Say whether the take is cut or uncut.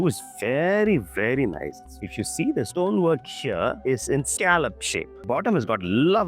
cut